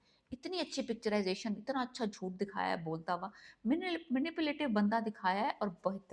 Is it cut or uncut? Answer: uncut